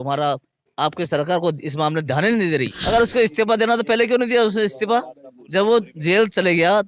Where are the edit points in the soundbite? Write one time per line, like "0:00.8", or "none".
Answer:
0:02.7